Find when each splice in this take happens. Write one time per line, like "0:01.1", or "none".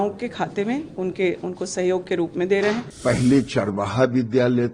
0:02.9